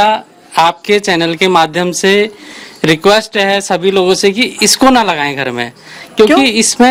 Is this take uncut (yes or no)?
yes